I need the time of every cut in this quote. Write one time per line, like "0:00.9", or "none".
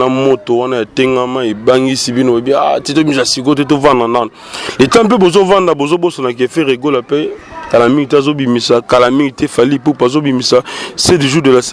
none